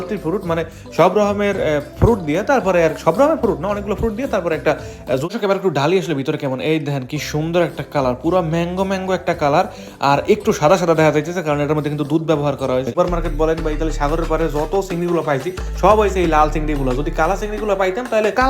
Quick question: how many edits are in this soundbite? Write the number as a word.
two